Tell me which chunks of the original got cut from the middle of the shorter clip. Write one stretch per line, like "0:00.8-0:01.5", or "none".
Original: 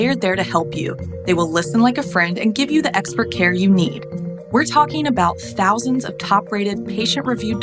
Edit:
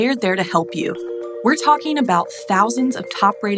0:01.1-0:04.2